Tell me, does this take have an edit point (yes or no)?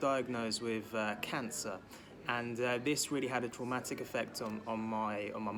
no